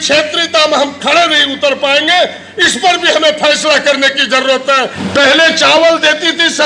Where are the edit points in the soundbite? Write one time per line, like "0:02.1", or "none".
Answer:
0:05.0